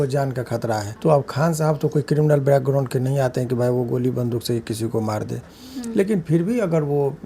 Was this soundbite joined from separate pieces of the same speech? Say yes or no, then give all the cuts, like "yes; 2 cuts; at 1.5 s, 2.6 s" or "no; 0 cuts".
yes; 1 cut; at 0.9 s